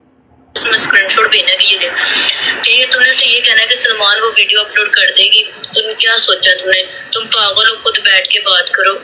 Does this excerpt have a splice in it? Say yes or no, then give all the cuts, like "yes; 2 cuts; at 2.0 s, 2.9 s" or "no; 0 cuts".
no; 0 cuts